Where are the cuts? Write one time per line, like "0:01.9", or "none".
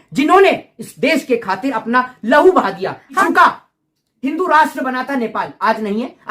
0:03.2

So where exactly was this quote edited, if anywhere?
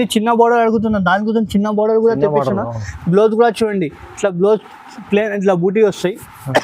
none

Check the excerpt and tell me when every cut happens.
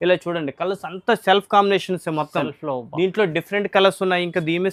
none

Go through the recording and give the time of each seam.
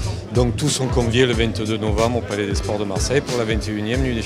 none

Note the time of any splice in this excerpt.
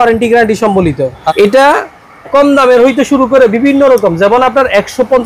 0:01.3

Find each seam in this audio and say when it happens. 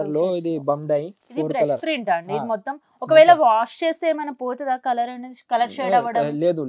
0:01.2

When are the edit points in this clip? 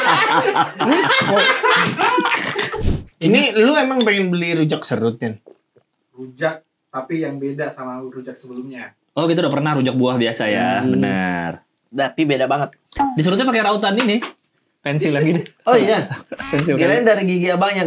0:02.8

